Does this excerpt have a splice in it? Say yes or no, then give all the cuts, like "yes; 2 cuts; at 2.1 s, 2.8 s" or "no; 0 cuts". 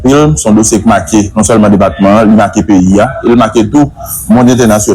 no; 0 cuts